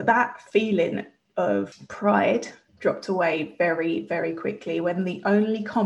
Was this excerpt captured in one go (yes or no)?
no